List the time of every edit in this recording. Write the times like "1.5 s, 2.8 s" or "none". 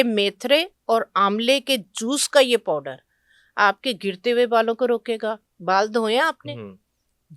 5.5 s